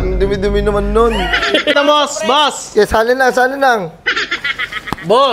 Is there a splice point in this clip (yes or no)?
yes